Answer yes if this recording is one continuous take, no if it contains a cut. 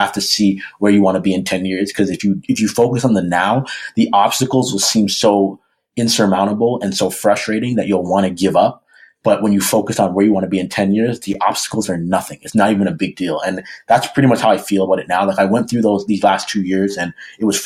yes